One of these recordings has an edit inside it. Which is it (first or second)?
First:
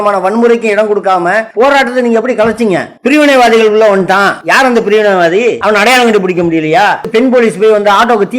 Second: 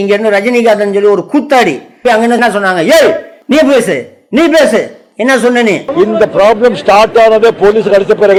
first